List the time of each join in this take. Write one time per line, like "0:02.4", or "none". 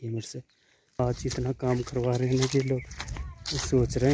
0:01.0